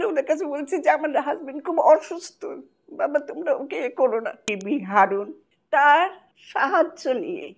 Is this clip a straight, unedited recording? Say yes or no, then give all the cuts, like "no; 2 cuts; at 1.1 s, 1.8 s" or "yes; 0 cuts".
no; 1 cut; at 4.5 s